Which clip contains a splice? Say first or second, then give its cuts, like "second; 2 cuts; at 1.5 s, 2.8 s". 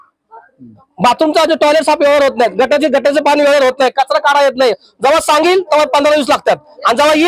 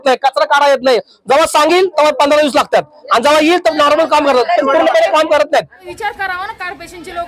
second; 1 cut; at 5.8 s